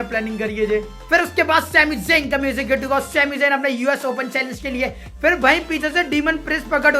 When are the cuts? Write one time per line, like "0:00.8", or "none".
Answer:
0:01.0
0:05.1